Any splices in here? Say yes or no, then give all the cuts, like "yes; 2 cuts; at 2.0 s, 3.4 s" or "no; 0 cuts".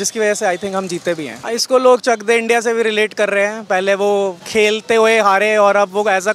yes; 2 cuts; at 1.4 s, 4.4 s